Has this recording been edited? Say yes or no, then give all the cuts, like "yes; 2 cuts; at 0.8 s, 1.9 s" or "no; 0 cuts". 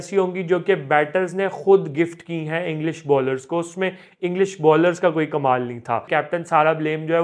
yes; 1 cut; at 6.1 s